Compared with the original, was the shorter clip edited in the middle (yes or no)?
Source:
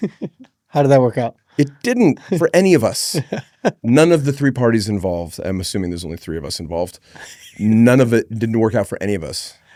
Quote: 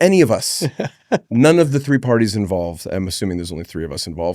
no